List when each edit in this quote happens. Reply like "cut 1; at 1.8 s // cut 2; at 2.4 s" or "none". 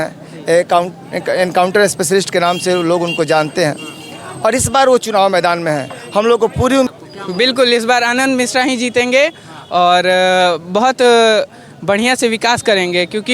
cut 1; at 6.9 s